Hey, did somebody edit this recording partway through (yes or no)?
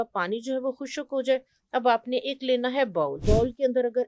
yes